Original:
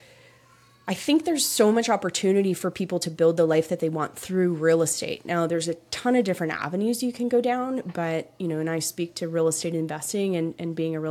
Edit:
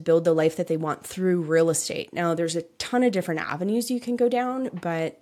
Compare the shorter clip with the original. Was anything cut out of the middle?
no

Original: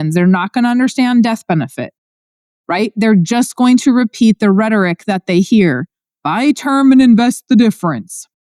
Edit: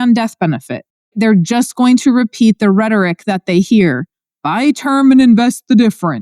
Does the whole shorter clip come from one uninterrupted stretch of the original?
no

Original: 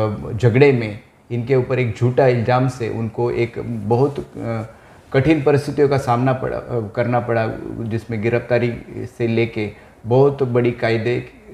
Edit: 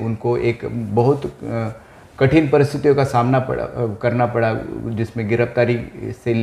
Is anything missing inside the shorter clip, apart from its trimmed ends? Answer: no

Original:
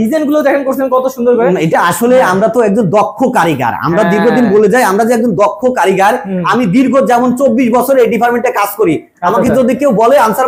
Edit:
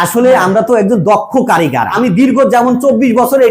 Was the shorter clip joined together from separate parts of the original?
yes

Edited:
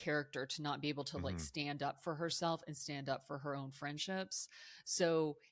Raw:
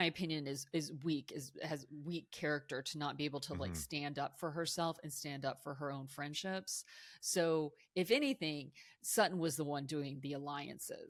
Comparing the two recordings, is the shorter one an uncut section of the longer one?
yes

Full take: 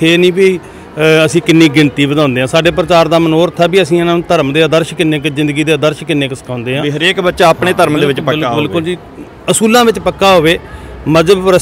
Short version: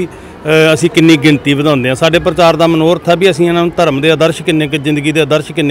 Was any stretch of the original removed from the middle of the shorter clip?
no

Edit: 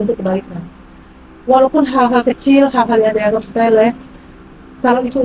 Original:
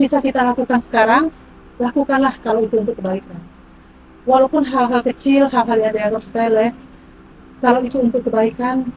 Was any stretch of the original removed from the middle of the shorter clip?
no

